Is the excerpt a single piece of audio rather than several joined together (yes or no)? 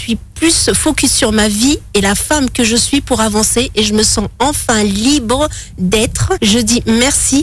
no